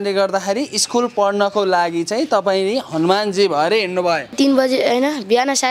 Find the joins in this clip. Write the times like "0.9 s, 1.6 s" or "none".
4.3 s